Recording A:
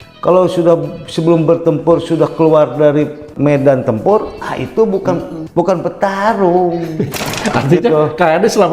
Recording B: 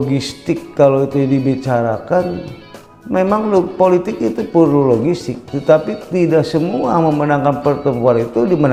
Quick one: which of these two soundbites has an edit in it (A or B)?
A